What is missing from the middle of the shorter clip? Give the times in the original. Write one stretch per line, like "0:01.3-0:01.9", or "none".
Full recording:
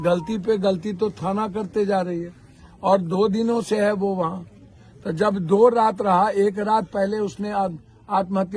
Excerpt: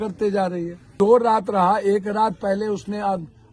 0:02.5-0:05.4